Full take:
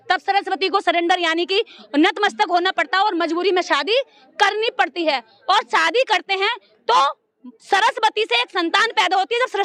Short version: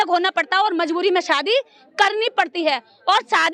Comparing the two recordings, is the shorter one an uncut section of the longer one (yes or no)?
yes